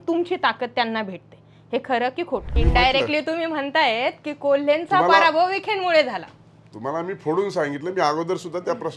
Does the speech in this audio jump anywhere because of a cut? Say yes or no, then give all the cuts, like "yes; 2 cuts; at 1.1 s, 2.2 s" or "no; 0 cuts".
yes; 1 cut; at 2.5 s